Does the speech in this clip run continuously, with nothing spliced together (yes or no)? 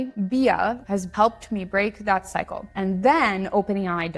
no